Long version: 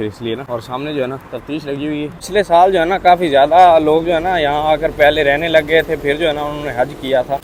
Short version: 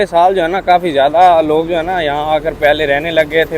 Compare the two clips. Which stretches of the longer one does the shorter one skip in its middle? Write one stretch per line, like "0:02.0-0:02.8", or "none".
none

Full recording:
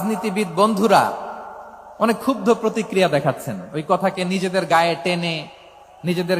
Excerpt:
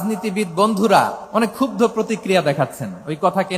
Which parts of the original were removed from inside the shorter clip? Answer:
0:01.2-0:01.9

